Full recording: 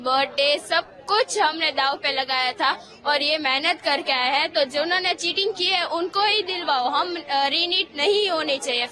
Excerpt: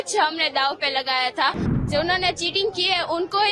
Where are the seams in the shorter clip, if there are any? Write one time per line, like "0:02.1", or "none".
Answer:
0:01.8